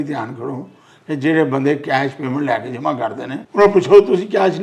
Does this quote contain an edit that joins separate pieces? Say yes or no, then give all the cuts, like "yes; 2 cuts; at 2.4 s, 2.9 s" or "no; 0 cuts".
yes; 1 cut; at 3.4 s